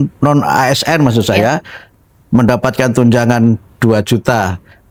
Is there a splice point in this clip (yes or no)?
no